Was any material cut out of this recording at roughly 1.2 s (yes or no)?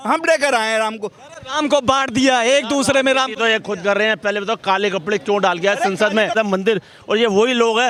no